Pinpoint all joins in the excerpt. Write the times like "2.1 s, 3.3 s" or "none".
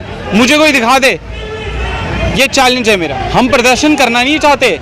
3.2 s